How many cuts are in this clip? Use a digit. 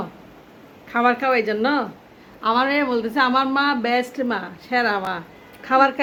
0